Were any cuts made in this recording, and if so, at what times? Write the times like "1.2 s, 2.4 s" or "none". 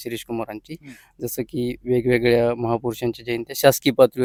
none